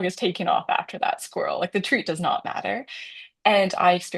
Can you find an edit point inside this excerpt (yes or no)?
no